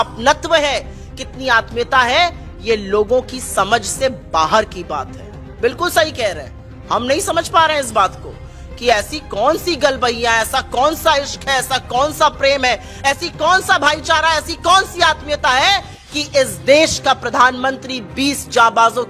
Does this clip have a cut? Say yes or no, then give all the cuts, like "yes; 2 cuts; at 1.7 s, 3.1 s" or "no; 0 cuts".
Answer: no; 0 cuts